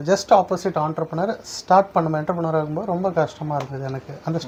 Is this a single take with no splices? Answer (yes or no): yes